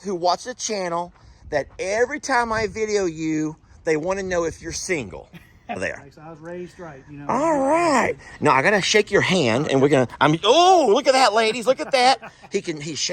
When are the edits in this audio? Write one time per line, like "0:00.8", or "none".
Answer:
0:05.8